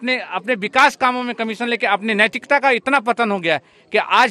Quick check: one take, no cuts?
yes; 0 cuts

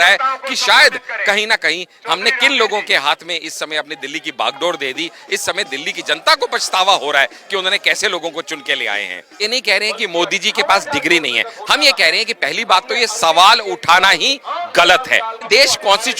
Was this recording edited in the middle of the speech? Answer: yes; 2 cuts; at 9.4 s, 15.5 s

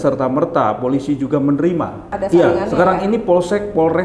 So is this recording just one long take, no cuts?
no; 1 cut; at 2.1 s

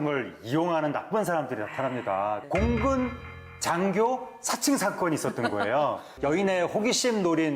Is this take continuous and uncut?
no; 2 cuts; at 2.4 s, 6.1 s

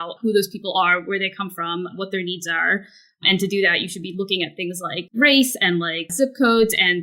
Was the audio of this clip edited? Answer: yes; 2 cuts; at 5.1 s, 6.0 s

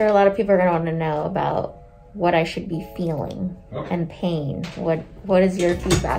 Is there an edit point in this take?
no; 0 cuts

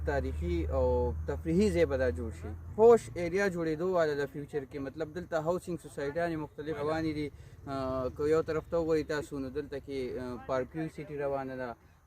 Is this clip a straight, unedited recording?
no; 2 cuts; at 2.7 s, 6.8 s

